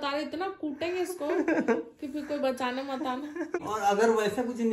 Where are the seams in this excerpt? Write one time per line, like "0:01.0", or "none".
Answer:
0:03.6